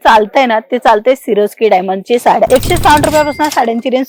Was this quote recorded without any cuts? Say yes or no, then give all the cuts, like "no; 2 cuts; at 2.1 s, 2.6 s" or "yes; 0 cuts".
no; 1 cut; at 2.5 s